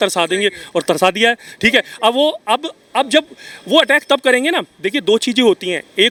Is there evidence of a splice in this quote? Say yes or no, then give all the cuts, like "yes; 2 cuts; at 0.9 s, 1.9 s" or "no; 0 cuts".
no; 0 cuts